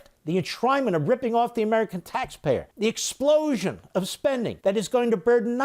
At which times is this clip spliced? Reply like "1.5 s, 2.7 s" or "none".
2.7 s, 4.6 s

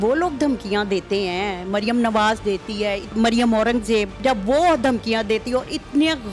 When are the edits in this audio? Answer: 3.1 s, 4.2 s

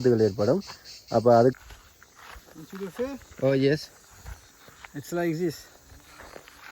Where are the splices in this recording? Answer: 1.5 s

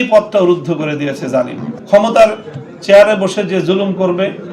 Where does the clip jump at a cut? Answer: 1.7 s

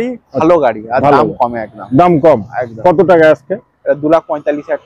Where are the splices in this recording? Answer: none

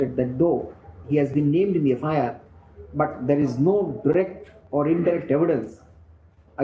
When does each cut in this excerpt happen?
none

